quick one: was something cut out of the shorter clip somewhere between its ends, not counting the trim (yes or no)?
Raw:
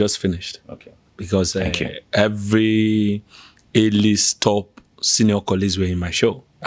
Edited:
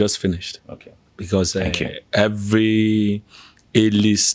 no